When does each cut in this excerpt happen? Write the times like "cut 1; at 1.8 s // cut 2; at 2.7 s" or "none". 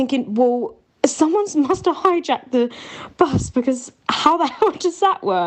none